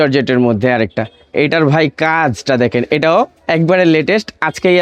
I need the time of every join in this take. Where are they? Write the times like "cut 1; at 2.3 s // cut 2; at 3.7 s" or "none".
none